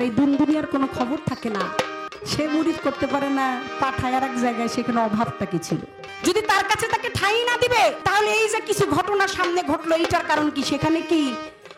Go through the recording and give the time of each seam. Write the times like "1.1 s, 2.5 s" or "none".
2.0 s, 6.0 s, 8.0 s